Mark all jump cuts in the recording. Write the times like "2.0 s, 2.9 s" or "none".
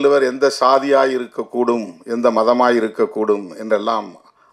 none